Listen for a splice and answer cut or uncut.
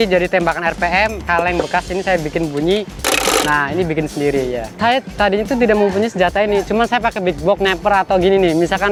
uncut